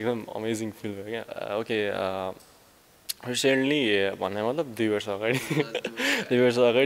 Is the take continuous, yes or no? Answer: yes